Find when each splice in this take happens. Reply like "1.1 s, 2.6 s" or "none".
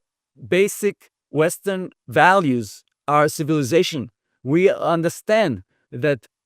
1.1 s, 2.0 s